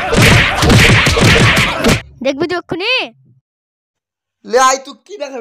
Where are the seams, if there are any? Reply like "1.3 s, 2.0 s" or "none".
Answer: 2.0 s